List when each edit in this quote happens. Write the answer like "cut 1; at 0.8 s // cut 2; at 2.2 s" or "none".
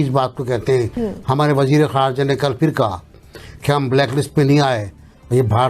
cut 1; at 0.9 s

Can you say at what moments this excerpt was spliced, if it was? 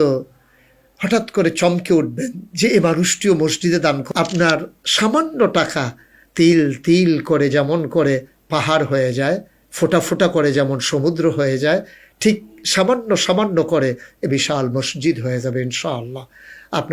cut 1; at 4.0 s

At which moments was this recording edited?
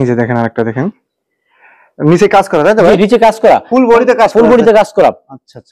none

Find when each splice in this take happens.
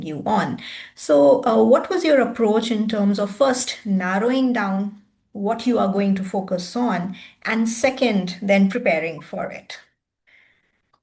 none

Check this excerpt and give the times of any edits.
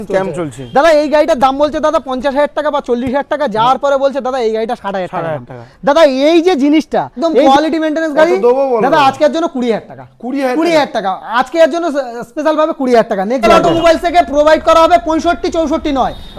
cut 1; at 7.4 s // cut 2; at 13.5 s

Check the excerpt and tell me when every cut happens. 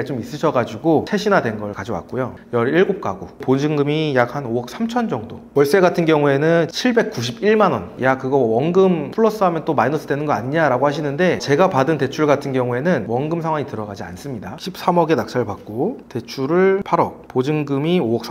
cut 1; at 1.1 s // cut 2; at 2.3 s // cut 3; at 3.4 s // cut 4; at 7.9 s // cut 5; at 14.5 s

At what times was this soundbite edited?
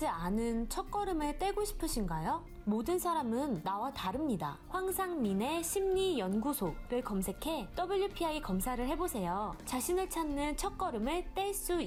none

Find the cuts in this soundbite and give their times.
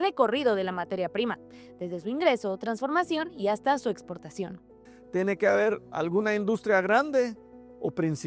cut 1; at 4.9 s

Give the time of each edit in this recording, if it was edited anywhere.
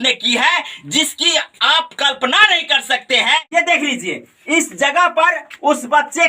cut 1; at 3.5 s

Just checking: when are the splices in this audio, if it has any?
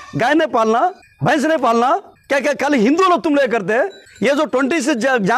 cut 1; at 1.1 s // cut 2; at 2.1 s // cut 3; at 4.0 s

